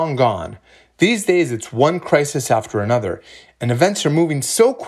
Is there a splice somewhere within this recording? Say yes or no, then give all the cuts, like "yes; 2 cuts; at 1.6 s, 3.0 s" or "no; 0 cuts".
no; 0 cuts